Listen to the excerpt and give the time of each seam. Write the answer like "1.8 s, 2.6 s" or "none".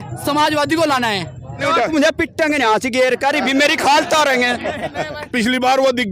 1.6 s, 5.2 s